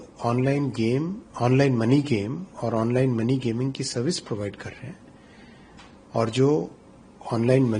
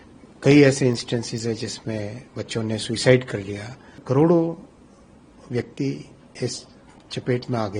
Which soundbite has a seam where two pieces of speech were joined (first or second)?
second